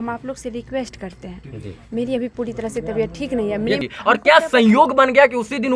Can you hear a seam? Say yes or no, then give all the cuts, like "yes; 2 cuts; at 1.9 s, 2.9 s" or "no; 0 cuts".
yes; 1 cut; at 3.9 s